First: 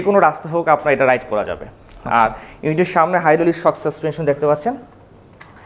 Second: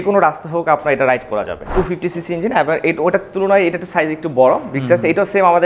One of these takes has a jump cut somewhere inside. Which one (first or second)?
second